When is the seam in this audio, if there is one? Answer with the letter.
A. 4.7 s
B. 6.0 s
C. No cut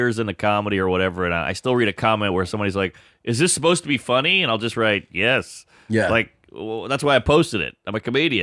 C